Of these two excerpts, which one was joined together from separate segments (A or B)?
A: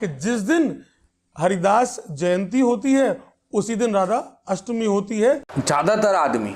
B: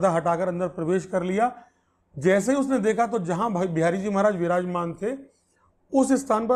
A